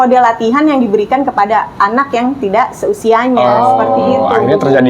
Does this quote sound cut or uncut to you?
uncut